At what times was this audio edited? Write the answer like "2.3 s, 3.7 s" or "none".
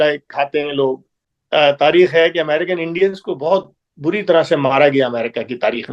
1.3 s